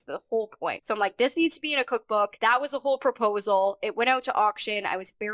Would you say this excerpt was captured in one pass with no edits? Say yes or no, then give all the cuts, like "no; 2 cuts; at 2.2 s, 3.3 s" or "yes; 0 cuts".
no; 2 cuts; at 0.8 s, 2.3 s